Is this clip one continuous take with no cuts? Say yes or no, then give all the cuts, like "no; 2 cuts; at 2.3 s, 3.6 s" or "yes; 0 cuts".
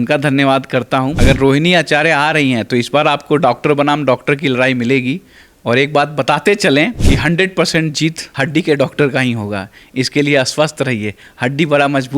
no; 3 cuts; at 1.2 s, 7.0 s, 8.2 s